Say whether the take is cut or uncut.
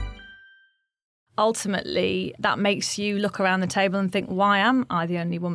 cut